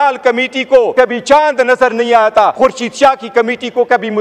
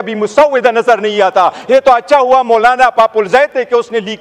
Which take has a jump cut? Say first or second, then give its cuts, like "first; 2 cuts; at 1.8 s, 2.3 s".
first; 2 cuts; at 0.9 s, 2.5 s